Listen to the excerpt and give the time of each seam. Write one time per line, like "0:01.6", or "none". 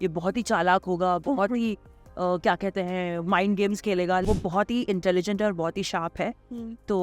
0:04.2